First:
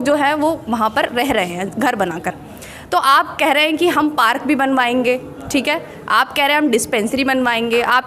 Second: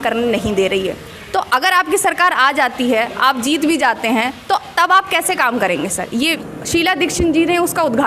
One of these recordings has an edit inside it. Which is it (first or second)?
second